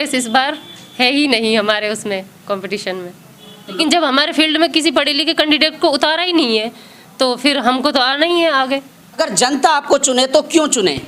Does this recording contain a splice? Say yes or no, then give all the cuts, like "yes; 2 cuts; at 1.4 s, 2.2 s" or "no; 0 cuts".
yes; 2 cuts; at 3.8 s, 9.2 s